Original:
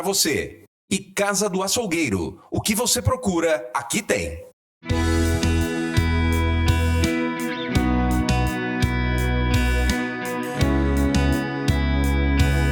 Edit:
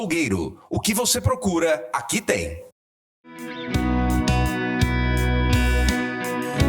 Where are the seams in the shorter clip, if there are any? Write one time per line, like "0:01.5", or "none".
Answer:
0:03.2